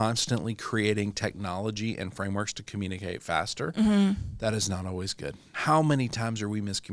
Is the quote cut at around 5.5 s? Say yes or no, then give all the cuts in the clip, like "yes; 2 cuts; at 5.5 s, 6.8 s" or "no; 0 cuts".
yes; 1 cut; at 5.5 s